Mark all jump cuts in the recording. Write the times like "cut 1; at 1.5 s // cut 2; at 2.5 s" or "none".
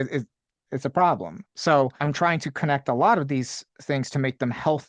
cut 1; at 2.0 s